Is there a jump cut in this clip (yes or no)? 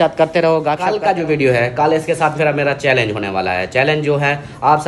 yes